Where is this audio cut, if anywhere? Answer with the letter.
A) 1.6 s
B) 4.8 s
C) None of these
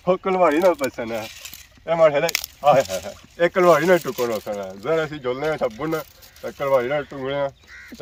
C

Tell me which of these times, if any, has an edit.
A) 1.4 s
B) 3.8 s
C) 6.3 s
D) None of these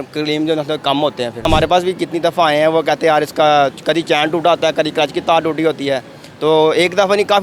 A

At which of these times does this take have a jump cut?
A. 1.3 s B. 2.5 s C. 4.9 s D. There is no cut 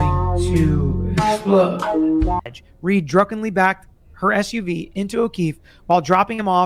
B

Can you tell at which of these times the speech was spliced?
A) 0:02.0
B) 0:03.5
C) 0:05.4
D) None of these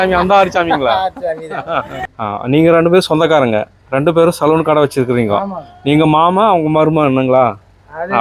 A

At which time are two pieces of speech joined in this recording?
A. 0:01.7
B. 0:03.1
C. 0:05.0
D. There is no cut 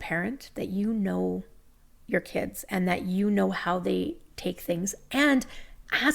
D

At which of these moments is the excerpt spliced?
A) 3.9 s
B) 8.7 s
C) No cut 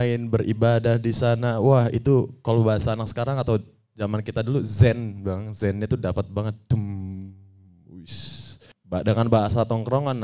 B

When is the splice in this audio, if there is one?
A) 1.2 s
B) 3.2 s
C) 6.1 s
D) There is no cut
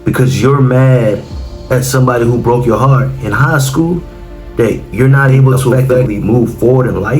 C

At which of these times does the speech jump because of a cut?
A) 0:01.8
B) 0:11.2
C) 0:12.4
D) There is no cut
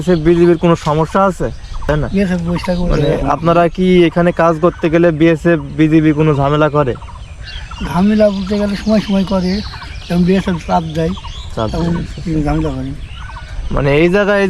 A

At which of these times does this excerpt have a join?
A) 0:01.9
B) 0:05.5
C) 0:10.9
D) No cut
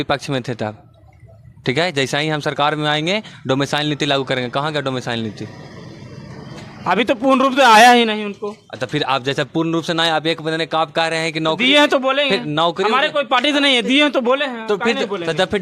D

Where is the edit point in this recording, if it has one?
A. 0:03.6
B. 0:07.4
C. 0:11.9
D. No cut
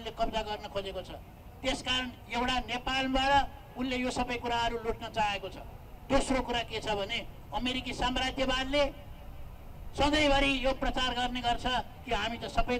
D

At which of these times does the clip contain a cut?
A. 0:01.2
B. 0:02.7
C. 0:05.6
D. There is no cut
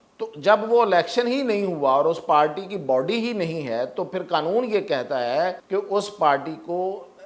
C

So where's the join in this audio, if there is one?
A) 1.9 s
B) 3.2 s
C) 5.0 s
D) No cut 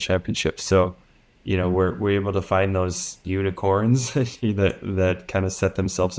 B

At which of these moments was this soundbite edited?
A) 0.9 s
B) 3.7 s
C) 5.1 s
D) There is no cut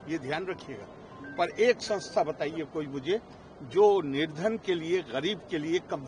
D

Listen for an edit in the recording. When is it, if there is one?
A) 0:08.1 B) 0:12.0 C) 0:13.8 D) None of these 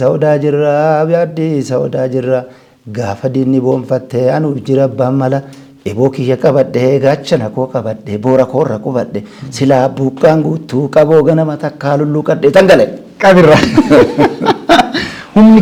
D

